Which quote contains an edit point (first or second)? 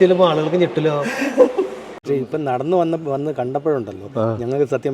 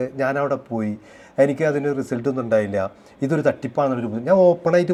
first